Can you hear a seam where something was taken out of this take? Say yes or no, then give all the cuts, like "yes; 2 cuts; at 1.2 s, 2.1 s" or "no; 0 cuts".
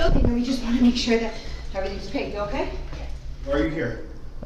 yes; 1 cut; at 3.5 s